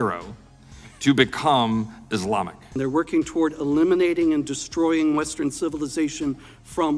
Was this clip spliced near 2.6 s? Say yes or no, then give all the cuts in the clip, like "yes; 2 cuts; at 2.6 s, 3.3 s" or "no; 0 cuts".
yes; 1 cut; at 2.6 s